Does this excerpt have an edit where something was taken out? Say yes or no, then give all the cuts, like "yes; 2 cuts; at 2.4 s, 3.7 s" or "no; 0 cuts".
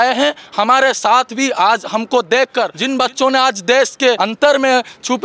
yes; 2 cuts; at 2.8 s, 4.2 s